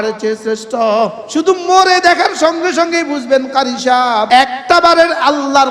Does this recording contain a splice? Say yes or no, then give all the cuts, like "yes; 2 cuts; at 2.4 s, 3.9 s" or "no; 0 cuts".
yes; 2 cuts; at 1.2 s, 4.2 s